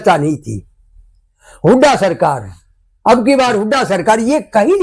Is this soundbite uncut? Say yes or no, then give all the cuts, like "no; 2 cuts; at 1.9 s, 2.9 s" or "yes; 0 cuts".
yes; 0 cuts